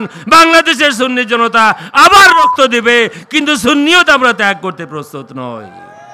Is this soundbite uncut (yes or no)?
yes